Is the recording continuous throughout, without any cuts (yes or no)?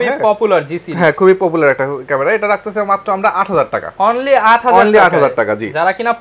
yes